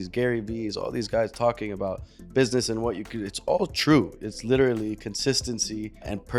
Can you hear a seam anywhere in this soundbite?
no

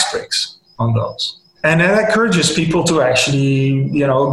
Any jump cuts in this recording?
yes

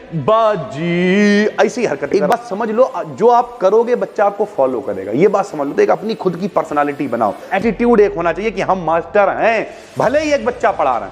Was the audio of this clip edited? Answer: yes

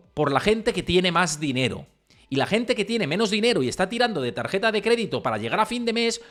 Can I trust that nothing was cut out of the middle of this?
yes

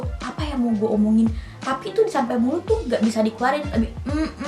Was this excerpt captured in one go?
yes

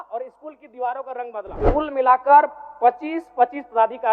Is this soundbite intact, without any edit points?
no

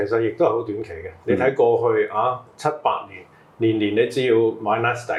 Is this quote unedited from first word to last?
yes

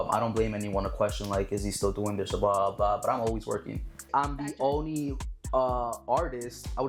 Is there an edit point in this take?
yes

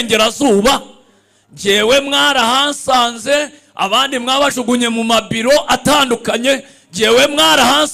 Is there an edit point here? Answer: no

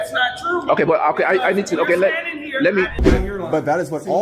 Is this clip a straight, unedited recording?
no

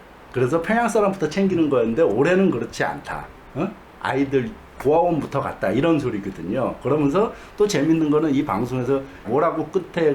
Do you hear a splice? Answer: yes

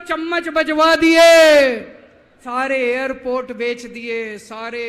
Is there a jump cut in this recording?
yes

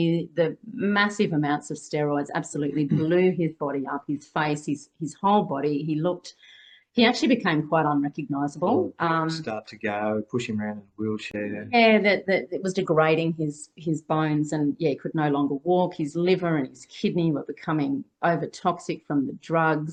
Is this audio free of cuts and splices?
yes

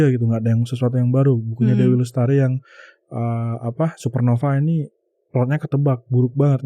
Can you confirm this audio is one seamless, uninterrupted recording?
yes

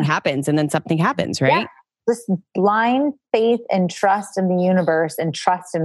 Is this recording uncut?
no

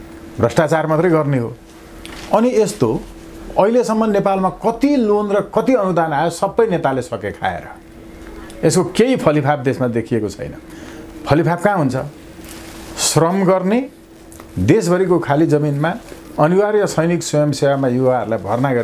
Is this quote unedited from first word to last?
yes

